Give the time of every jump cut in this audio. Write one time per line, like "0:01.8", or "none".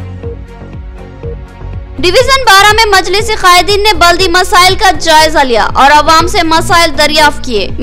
0:01.7